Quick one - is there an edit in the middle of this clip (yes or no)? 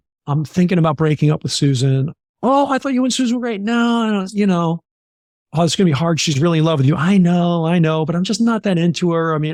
no